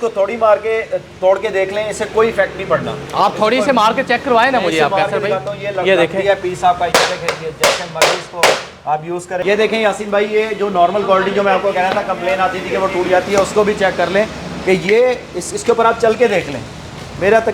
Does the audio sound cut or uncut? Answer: cut